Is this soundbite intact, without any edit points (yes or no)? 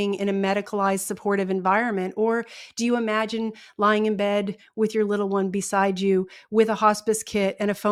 yes